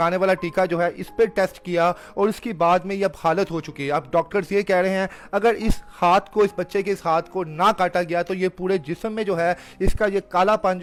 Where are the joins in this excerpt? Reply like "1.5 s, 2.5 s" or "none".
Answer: none

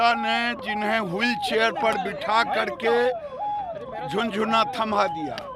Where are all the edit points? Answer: none

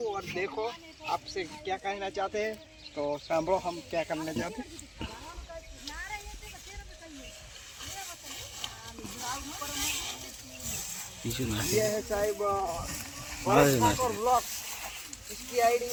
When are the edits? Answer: none

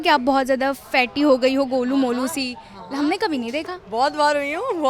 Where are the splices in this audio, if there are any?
none

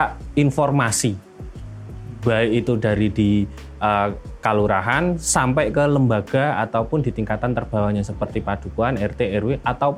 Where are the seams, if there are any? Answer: none

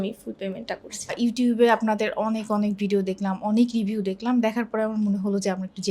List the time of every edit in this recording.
1.1 s

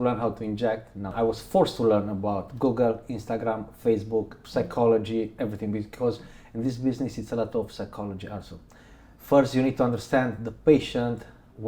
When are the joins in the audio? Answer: 1.1 s

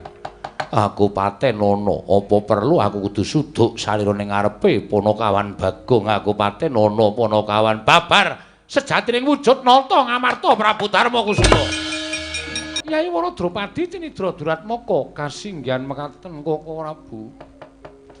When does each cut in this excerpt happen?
12.7 s

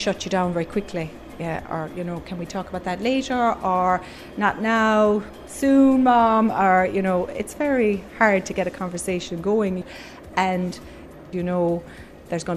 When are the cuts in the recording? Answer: 9.8 s, 11.2 s

